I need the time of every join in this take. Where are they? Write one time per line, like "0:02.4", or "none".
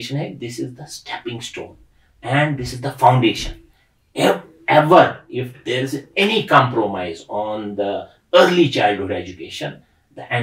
none